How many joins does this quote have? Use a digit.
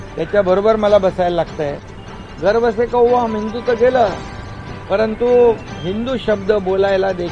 1